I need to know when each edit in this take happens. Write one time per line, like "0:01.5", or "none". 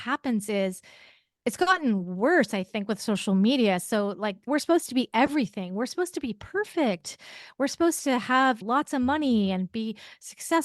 0:04.5
0:08.6